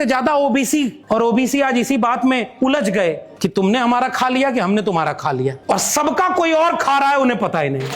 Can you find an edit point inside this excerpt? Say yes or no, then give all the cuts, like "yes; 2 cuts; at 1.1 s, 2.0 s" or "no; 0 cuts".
yes; 3 cuts; at 1.0 s, 3.3 s, 5.6 s